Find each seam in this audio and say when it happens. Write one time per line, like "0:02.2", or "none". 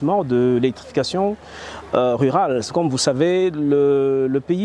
none